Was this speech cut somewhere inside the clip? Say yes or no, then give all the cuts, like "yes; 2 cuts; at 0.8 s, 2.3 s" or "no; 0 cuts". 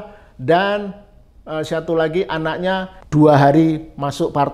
yes; 1 cut; at 3.0 s